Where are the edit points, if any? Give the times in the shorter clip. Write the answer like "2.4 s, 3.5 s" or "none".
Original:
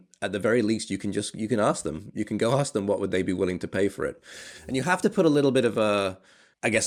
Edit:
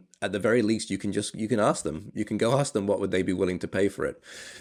none